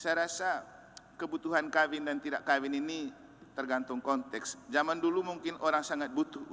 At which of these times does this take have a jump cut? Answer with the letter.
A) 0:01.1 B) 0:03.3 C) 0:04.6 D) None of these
D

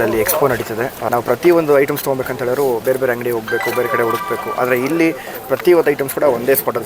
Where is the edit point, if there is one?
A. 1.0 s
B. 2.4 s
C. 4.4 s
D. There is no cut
A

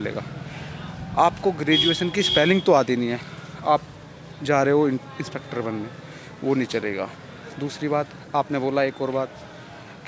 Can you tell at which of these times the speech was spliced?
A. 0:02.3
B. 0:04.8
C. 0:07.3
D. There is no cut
D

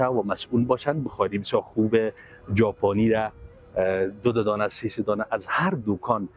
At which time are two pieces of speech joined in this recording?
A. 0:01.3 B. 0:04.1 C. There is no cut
C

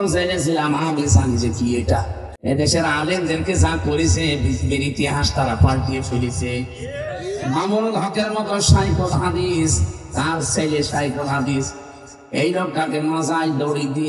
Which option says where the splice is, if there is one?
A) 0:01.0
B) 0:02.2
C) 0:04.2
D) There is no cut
B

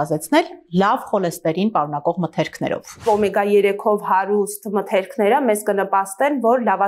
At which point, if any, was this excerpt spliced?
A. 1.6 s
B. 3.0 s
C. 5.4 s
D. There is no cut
B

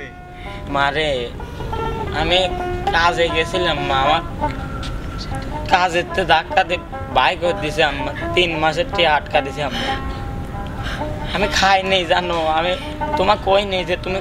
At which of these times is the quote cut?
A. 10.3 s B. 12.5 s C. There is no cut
C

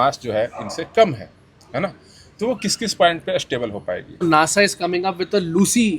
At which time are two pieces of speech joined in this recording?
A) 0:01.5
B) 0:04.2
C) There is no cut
B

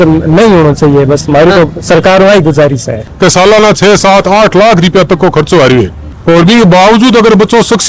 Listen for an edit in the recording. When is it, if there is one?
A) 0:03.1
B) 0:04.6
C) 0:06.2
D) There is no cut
A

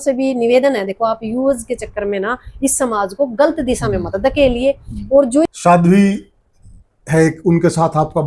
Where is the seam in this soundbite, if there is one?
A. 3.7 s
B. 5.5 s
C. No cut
B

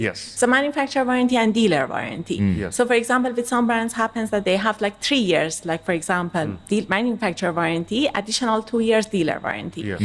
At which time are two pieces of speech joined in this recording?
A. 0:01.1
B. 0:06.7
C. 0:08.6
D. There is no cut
D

